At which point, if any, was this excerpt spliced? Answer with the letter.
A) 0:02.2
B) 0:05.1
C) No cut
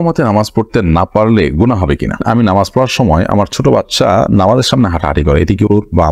A